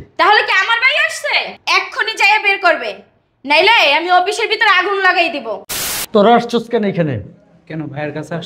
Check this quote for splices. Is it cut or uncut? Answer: cut